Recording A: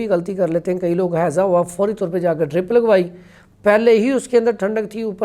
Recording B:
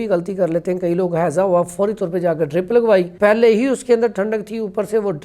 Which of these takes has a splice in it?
B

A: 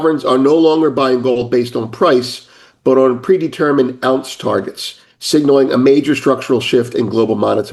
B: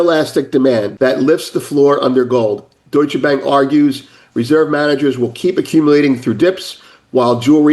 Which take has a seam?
B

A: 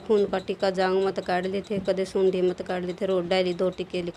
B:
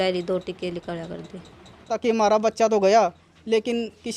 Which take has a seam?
B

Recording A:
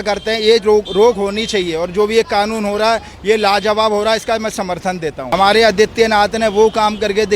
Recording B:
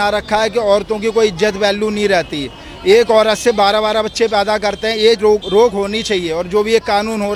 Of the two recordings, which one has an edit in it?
A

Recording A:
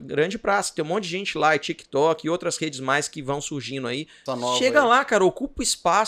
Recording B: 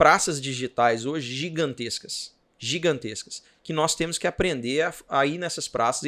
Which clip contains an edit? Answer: A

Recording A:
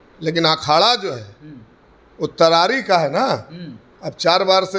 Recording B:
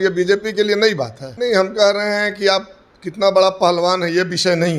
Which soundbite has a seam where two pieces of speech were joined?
B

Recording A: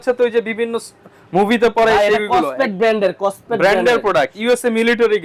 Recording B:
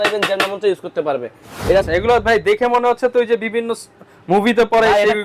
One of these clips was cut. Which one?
B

